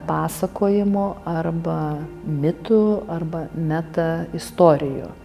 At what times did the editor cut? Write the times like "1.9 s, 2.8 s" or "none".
none